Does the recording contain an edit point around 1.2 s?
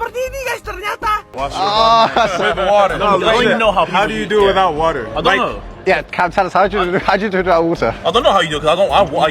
yes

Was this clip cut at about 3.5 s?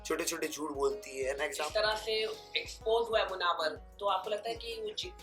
no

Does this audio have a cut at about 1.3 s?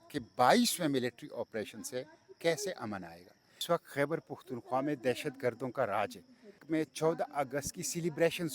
no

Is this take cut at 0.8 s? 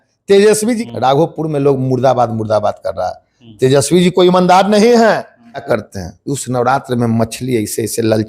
yes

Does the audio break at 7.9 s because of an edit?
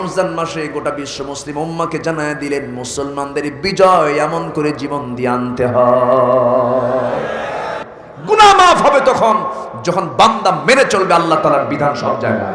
yes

